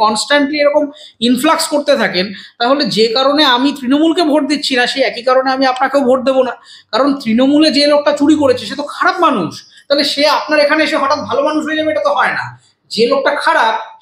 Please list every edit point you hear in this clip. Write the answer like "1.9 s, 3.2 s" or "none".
none